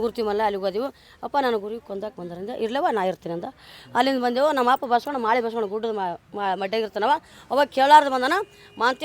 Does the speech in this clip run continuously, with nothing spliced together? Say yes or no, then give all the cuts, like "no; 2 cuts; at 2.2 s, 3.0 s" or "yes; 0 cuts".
yes; 0 cuts